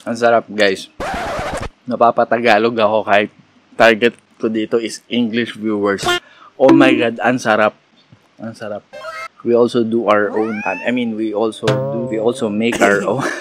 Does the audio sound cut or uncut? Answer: cut